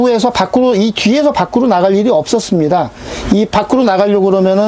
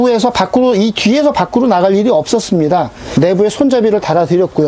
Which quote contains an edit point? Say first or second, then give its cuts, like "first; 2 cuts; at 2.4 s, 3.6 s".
second; 1 cut; at 3.0 s